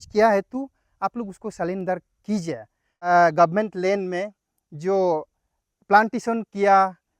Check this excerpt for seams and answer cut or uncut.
cut